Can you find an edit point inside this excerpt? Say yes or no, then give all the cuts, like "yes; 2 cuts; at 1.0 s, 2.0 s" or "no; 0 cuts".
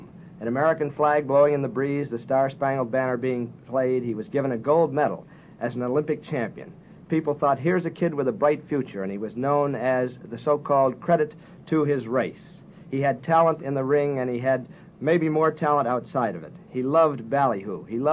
yes; 1 cut; at 14.4 s